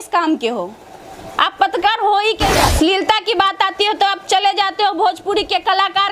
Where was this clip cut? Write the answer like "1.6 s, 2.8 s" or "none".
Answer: 2.6 s

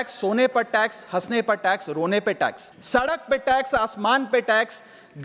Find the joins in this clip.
2.7 s

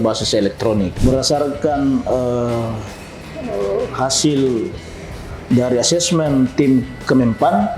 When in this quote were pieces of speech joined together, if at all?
0.9 s

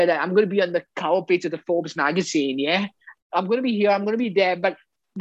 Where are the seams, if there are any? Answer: 3.1 s

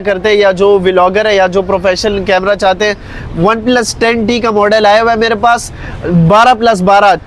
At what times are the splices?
none

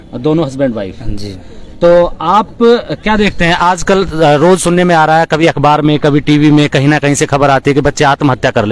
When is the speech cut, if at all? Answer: none

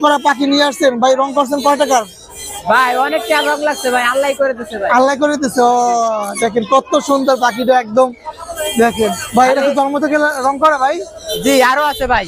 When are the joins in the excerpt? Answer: none

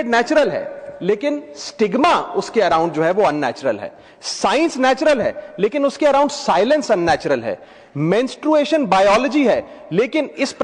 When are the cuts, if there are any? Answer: none

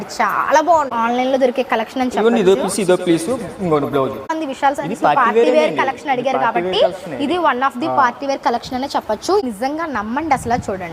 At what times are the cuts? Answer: 0.9 s, 4.3 s, 9.4 s

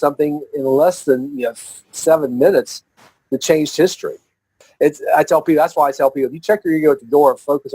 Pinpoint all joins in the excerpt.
4.5 s

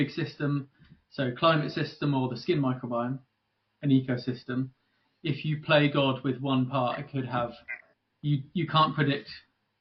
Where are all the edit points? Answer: none

